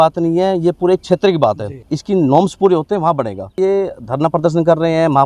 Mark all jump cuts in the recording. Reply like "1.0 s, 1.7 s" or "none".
3.6 s